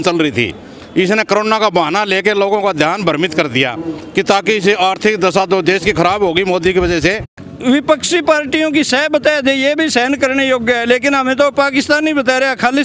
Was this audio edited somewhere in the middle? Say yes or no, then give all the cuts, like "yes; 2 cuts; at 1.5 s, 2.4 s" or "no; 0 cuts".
yes; 1 cut; at 7.4 s